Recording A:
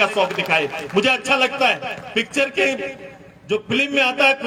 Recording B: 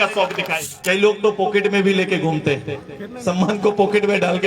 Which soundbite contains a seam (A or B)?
B